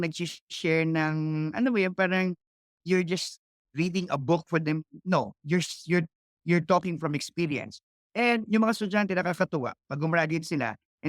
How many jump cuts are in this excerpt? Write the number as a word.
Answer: zero